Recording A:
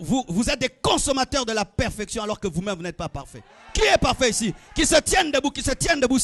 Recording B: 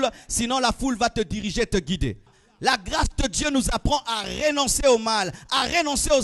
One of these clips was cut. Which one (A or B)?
B